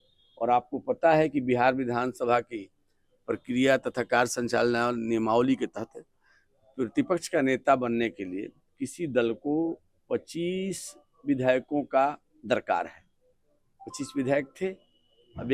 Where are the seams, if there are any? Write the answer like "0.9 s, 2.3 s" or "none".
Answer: none